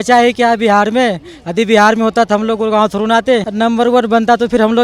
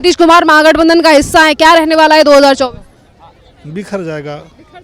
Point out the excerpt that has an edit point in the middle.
first; 1 cut; at 3.5 s

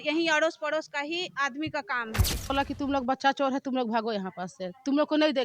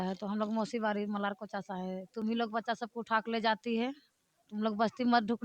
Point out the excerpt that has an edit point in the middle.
first; 1 cut; at 2.5 s

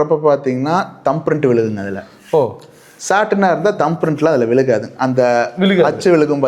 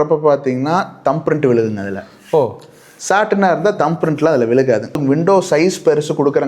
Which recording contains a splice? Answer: second; 1 cut; at 5.0 s

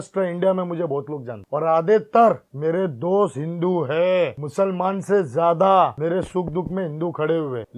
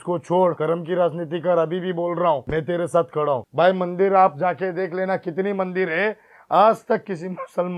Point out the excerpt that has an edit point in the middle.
second; 1 cut; at 3.4 s

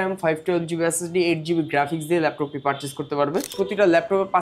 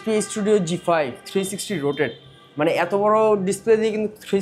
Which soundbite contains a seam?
first; 1 cut; at 3.5 s

